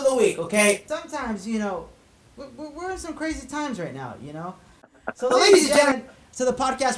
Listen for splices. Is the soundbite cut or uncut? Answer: cut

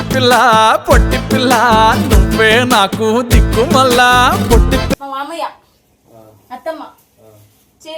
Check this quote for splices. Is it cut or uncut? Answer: cut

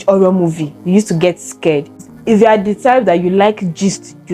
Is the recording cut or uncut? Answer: cut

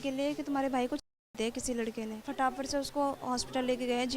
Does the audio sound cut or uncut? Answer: cut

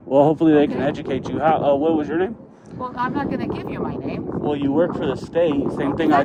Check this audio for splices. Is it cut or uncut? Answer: uncut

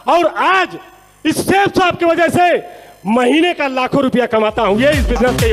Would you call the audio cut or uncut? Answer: uncut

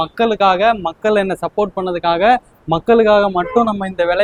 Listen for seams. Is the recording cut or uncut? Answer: uncut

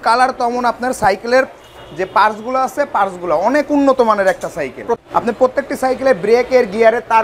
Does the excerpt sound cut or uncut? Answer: cut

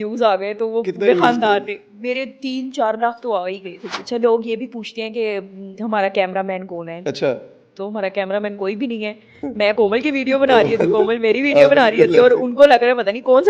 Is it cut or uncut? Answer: cut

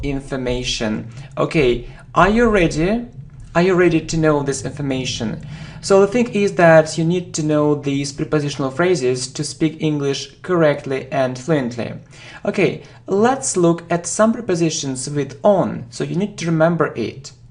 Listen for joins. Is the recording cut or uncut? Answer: uncut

